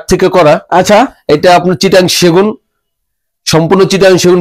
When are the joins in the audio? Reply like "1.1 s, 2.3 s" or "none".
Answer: none